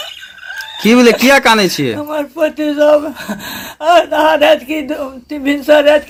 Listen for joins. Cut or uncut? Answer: uncut